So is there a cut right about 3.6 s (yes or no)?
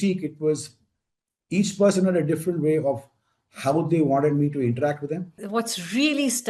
no